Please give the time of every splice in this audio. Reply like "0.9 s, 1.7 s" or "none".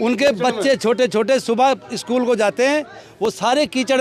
none